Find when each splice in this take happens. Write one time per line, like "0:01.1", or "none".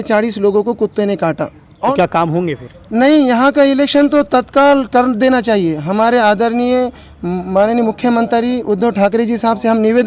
0:01.9